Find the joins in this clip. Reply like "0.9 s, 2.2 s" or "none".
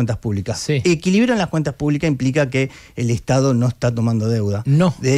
none